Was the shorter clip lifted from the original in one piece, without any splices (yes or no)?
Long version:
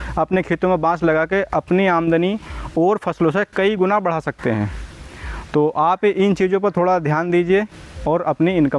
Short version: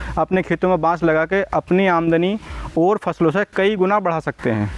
yes